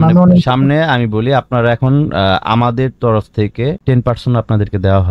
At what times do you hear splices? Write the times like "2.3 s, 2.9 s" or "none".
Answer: 3.8 s